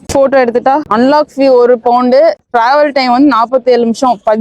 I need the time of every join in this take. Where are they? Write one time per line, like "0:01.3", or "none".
0:00.9
0:02.4